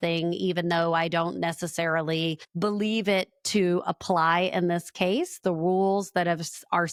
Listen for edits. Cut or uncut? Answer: uncut